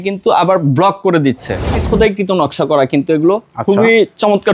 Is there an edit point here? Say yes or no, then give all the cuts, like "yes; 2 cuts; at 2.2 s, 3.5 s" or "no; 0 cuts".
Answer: yes; 1 cut; at 1.8 s